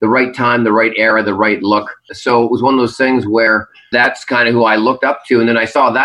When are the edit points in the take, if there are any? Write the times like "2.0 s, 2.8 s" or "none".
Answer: 2.1 s, 3.8 s